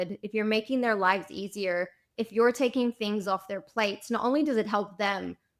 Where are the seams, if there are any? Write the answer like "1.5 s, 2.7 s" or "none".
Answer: none